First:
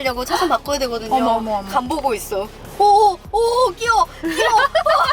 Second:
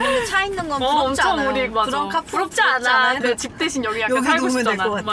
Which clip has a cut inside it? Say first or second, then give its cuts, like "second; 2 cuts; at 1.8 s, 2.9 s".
second; 1 cut; at 3.2 s